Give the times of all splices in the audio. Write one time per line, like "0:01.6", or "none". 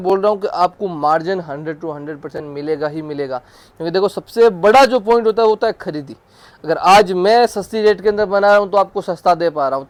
none